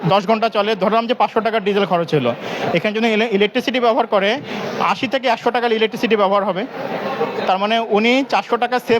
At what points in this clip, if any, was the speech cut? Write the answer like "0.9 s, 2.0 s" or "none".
none